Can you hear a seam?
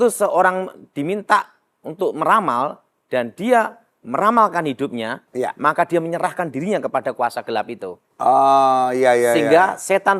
no; 0 cuts

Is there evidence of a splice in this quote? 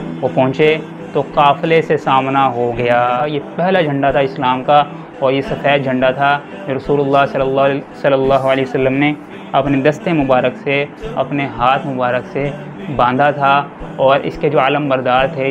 yes; 1 cut; at 3.2 s

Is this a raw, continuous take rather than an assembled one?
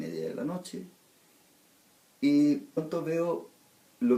yes; 0 cuts

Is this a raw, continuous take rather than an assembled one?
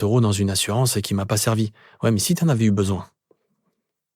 yes; 0 cuts

